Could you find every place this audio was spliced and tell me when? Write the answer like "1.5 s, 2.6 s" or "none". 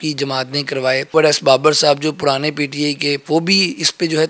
1.1 s, 3.2 s